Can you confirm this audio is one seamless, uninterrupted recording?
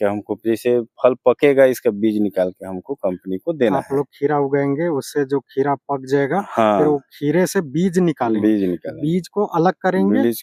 yes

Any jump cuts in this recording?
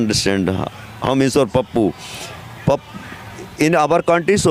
no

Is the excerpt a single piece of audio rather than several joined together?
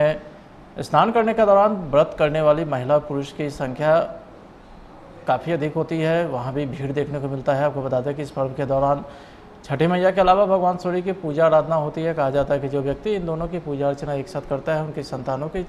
yes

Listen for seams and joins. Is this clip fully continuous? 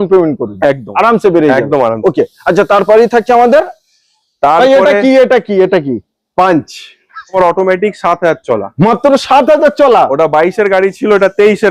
yes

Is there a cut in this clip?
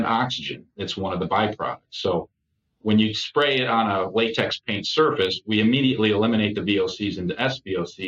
no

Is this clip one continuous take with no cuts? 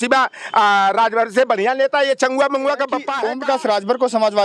no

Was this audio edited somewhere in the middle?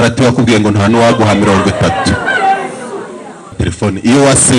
yes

